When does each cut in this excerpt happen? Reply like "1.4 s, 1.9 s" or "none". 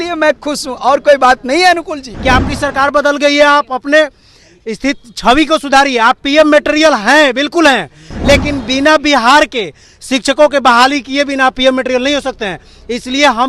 2.0 s